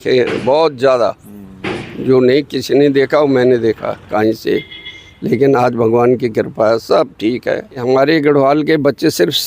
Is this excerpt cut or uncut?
cut